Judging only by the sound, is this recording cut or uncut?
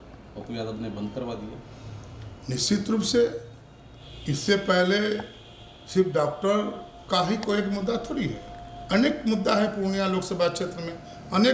uncut